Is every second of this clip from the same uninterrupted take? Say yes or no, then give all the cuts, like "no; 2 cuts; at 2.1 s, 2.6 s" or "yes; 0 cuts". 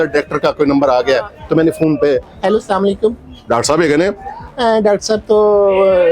yes; 0 cuts